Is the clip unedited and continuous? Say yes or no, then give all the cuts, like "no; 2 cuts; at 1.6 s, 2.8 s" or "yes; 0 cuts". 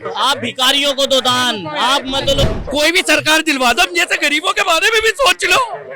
no; 1 cut; at 2.4 s